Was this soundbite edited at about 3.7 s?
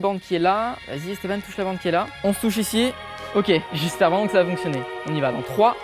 yes; 3 cuts; at 0.9 s, 2.1 s, 3.7 s

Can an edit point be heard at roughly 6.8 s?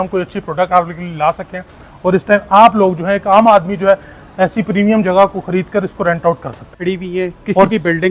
yes; 1 cut; at 6.8 s

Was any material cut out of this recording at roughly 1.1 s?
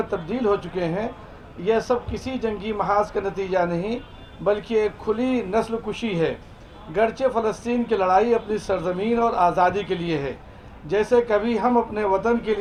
no; 0 cuts

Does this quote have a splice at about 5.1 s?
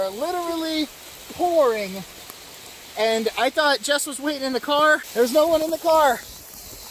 yes; 1 cut; at 5.1 s

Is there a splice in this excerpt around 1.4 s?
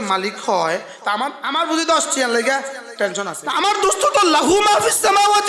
yes; 2 cuts; at 1.4 s, 3.4 s

